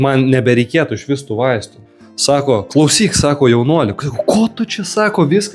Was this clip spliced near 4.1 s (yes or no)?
no